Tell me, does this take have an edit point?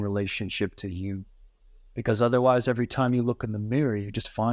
no; 0 cuts

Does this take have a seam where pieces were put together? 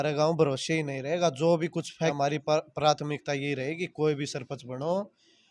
yes; 1 cut; at 1.9 s

